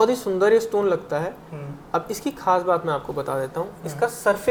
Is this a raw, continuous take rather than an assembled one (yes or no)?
yes